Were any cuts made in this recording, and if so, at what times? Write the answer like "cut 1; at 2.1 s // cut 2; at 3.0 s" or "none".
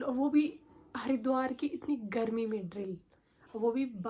none